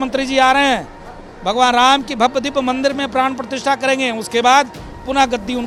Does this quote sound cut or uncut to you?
uncut